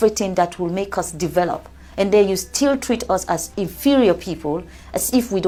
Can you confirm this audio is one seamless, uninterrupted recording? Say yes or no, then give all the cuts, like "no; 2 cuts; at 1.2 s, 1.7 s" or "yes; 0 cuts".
yes; 0 cuts